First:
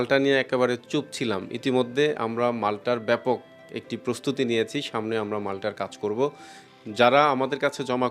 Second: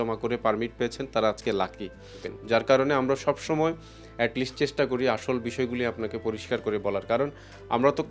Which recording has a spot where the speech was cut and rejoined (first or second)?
second